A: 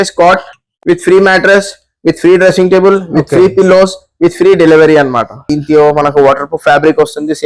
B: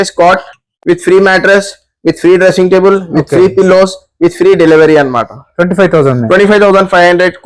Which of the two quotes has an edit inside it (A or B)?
A